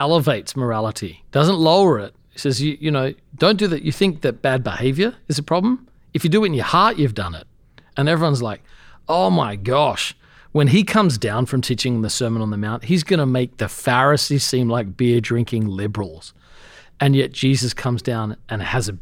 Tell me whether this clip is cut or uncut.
uncut